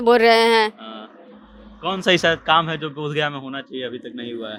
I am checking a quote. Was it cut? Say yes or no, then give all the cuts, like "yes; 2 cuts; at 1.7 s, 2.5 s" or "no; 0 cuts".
no; 0 cuts